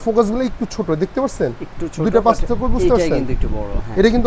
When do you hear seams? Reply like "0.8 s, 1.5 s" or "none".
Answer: none